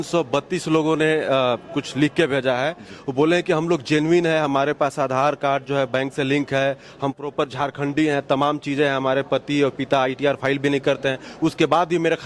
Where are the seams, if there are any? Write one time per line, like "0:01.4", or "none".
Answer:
none